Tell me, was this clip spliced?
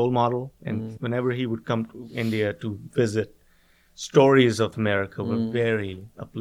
yes; 2 cuts; at 0.9 s, 4.7 s

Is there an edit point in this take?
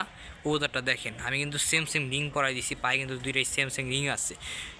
no; 0 cuts

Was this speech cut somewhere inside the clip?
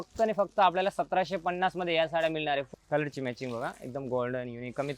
yes; 1 cut; at 2.7 s

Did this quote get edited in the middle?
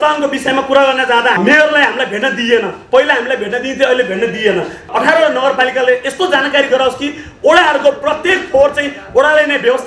yes; 2 cuts; at 1.4 s, 4.8 s

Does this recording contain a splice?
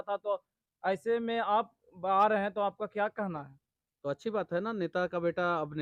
no; 0 cuts

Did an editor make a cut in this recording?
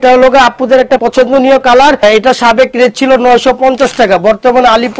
yes; 2 cuts; at 1.0 s, 2.0 s

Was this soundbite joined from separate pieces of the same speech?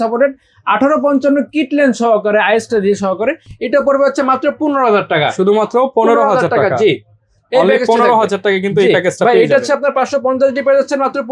no; 0 cuts

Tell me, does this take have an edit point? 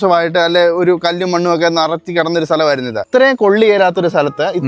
yes; 1 cut; at 3.0 s

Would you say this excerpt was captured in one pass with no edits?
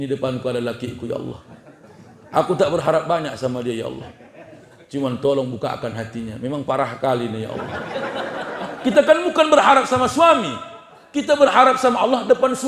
yes; 0 cuts

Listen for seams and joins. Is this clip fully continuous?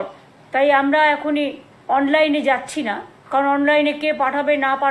yes; 0 cuts

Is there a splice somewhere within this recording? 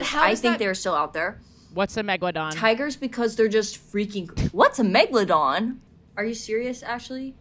yes; 2 cuts; at 2.5 s, 5.9 s

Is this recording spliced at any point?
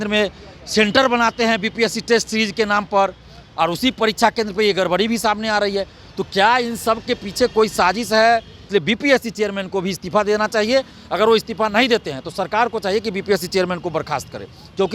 yes; 1 cut; at 8.6 s

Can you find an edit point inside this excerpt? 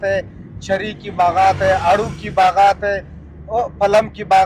no; 0 cuts

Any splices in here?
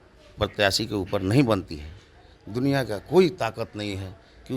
no; 0 cuts

